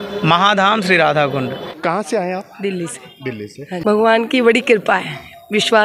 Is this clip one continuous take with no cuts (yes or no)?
yes